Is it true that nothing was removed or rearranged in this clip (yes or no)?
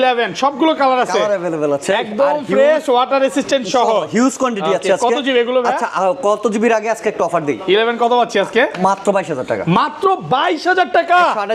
yes